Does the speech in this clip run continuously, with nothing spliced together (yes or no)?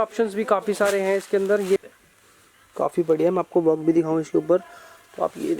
no